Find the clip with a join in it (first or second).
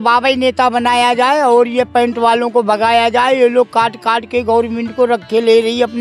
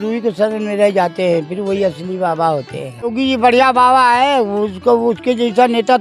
second